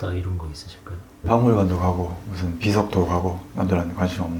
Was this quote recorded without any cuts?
no; 1 cut; at 1.2 s

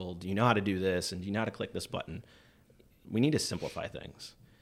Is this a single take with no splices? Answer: no; 1 cut; at 3.0 s

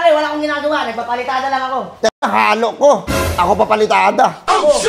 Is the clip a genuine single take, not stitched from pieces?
yes; 0 cuts

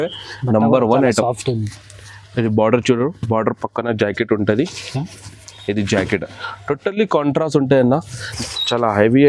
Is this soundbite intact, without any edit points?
no; 1 cut; at 8.2 s

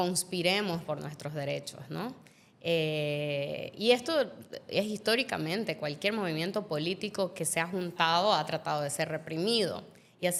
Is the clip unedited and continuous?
yes; 0 cuts

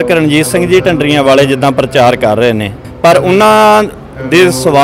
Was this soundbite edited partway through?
yes; 1 cut; at 2.8 s

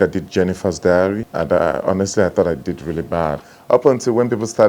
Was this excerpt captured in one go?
no; 2 cuts; at 1.3 s, 3.5 s

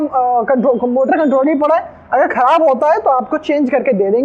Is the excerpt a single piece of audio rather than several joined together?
yes; 0 cuts

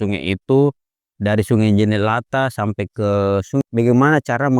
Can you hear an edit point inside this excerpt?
yes; 1 cut; at 3.6 s

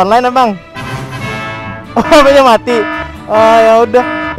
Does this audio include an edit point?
no; 0 cuts

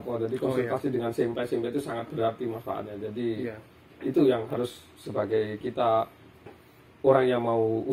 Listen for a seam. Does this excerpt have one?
no; 0 cuts

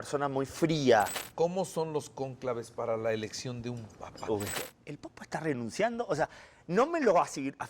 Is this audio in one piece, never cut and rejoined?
no; 2 cuts; at 1.2 s, 4.6 s

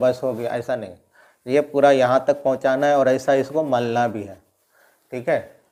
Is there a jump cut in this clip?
no; 0 cuts

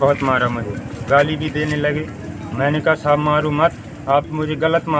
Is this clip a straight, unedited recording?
yes; 0 cuts

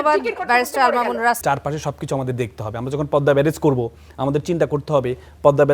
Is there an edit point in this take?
yes; 1 cut; at 1.4 s

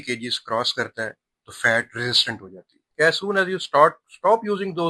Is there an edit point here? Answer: yes; 1 cut; at 2.8 s

